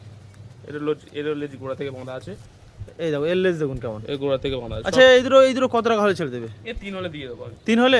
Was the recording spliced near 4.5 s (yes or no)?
no